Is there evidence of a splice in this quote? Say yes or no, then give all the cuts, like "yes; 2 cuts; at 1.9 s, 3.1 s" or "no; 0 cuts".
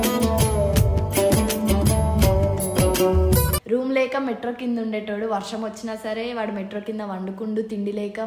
yes; 1 cut; at 3.6 s